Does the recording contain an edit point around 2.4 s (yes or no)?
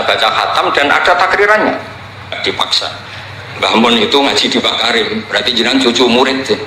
yes